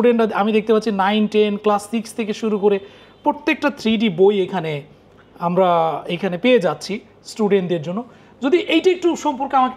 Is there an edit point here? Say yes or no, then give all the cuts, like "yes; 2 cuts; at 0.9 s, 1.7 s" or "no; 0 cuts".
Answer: no; 0 cuts